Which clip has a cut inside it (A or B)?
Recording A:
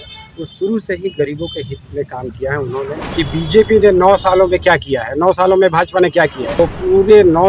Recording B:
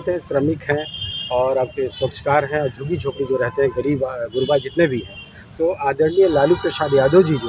A